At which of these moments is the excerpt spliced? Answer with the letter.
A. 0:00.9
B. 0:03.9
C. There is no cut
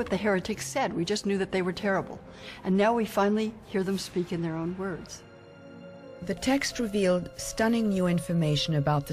A